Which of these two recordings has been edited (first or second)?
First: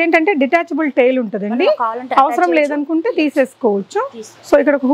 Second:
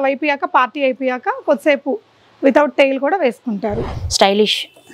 second